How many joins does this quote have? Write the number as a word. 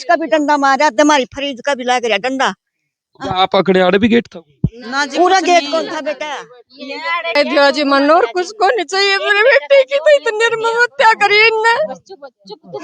one